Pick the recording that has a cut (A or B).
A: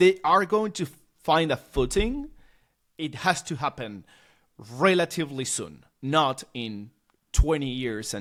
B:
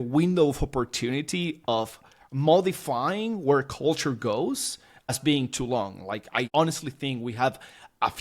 B